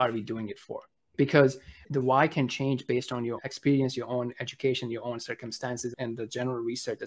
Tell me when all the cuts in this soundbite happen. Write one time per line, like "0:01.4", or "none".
0:01.1
0:01.8
0:03.4
0:05.9